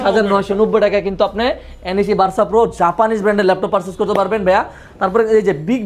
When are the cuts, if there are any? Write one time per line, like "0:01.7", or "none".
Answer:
none